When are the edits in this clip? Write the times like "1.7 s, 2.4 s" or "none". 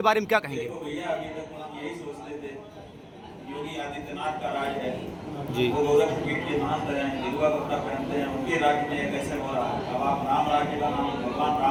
none